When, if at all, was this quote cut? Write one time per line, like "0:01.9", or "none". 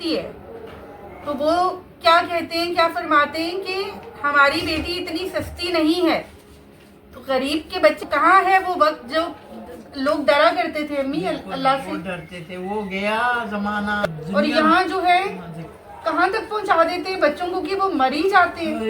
0:08.0
0:14.0